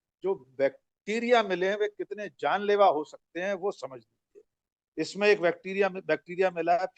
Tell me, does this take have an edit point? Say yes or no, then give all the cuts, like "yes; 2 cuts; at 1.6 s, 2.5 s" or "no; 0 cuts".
no; 0 cuts